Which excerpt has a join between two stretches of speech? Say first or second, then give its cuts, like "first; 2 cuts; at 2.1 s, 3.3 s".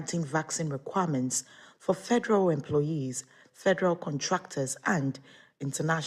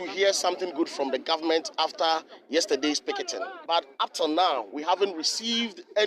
second; 1 cut; at 3.5 s